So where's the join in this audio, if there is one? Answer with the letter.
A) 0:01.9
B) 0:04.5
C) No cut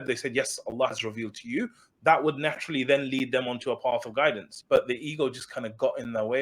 B